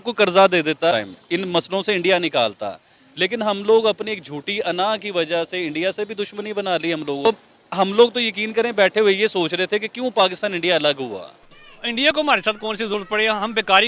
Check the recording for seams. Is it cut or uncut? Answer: cut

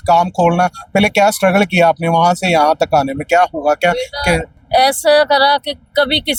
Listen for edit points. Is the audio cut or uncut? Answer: uncut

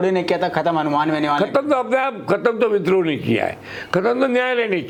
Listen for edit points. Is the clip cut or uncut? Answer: uncut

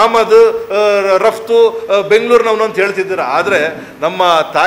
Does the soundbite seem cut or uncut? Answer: uncut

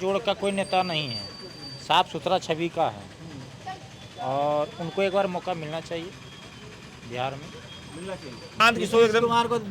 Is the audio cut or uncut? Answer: cut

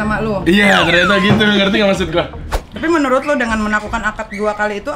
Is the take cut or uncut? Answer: cut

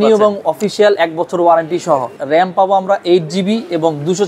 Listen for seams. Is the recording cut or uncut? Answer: cut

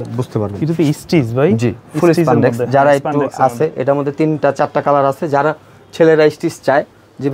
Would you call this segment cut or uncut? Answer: uncut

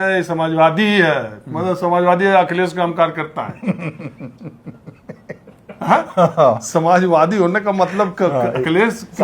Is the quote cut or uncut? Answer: uncut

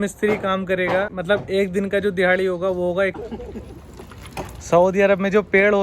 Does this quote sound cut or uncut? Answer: cut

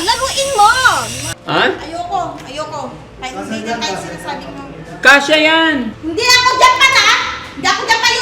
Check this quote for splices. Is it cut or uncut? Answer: cut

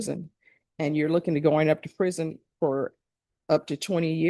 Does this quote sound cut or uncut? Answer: uncut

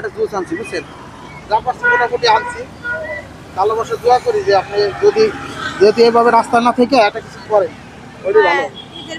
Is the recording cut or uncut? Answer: uncut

